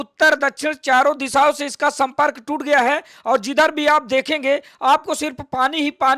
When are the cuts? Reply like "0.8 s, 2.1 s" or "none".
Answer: none